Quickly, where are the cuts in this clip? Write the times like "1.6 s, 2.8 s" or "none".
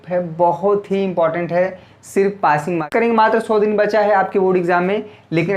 2.9 s

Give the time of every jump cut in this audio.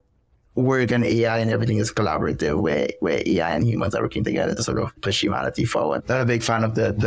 5.0 s, 6.0 s

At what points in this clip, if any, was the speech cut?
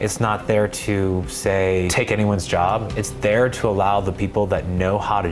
1.9 s

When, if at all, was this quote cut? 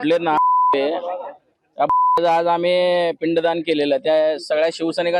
none

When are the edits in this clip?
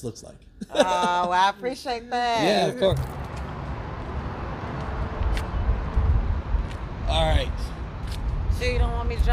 3.0 s

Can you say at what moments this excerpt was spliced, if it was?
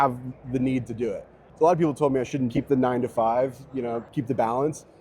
1.4 s, 2.5 s, 4.1 s

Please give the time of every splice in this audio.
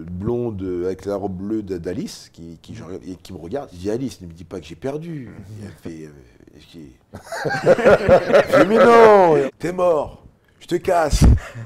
3.7 s, 9.4 s

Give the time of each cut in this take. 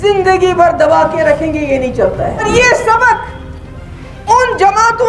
2.5 s

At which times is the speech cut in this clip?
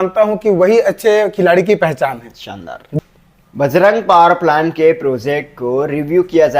3.0 s

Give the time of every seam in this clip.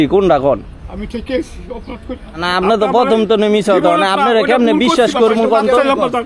2.4 s

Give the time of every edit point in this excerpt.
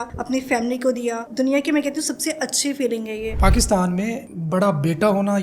1.2 s, 3.4 s

